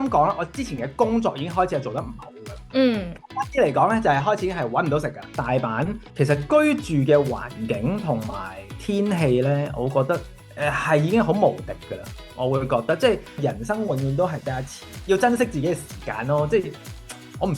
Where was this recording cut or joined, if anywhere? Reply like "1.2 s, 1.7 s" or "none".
5.4 s, 13.4 s